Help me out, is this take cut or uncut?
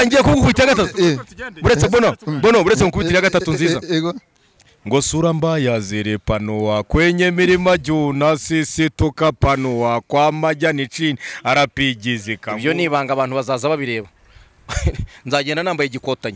cut